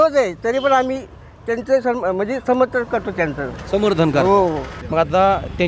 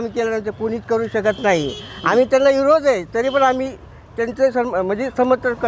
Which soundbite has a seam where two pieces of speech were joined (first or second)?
first